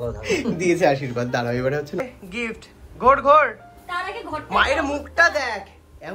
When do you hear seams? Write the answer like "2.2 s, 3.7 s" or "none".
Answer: 2.0 s